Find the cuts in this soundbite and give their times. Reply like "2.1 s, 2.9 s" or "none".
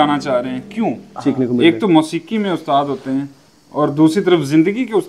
1.1 s